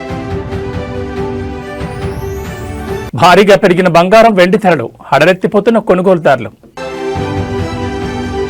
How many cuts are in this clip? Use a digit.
0